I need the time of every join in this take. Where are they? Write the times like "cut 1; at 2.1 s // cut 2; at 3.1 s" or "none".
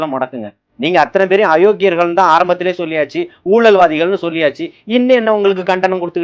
none